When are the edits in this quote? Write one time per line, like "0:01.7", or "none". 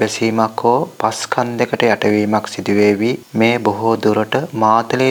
none